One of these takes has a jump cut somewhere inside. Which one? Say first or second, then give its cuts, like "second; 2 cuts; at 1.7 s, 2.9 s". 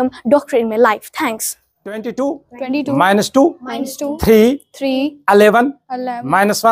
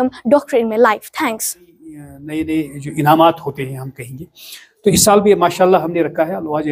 second; 1 cut; at 2.1 s